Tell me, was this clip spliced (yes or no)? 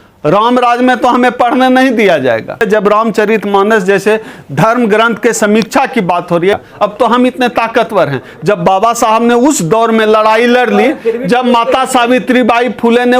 yes